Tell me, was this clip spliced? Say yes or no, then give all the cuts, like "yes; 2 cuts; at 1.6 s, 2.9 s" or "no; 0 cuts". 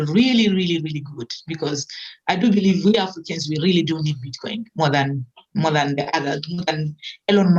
no; 0 cuts